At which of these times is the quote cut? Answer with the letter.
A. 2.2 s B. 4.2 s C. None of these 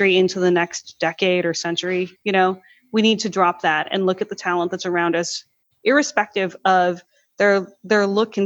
A